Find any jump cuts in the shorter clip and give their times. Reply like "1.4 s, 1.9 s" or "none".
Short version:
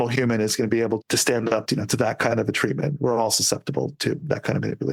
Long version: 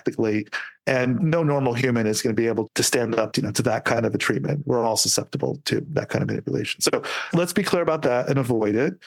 none

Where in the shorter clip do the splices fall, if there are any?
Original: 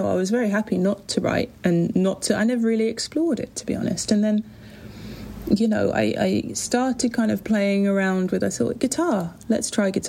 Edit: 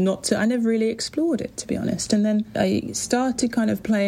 2.5 s

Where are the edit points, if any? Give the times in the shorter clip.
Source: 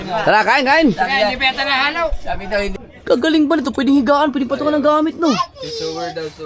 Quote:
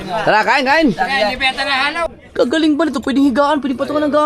2.2 s

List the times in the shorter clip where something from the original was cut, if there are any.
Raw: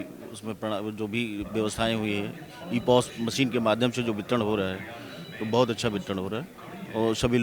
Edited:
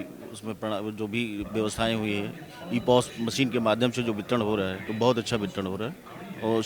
4.8 s

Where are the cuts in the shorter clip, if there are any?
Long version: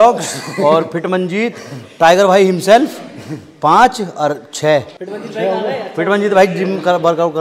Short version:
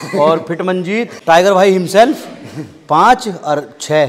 1.1 s

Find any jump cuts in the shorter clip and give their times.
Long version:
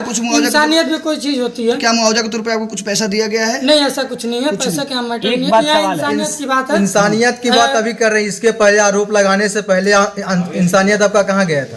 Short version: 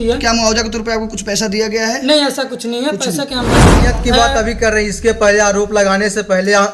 3.8 s

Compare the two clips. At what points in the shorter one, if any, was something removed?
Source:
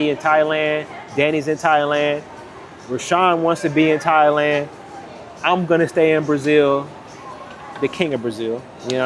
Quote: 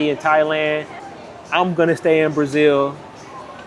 1.0 s

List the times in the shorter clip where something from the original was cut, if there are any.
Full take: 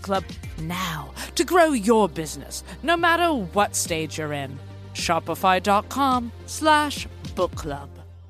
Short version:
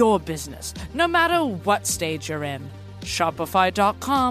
none

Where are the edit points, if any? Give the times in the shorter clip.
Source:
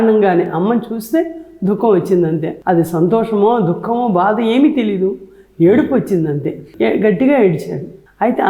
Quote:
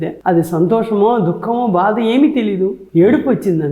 2.8 s

